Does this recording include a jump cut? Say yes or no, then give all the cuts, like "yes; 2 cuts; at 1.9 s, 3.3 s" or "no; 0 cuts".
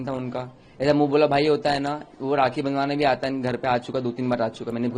no; 0 cuts